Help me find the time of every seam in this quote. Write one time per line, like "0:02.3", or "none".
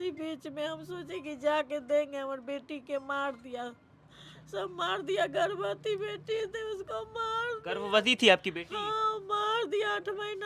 none